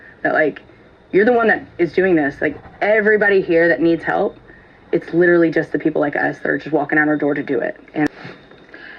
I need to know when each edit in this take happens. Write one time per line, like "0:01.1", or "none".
0:08.1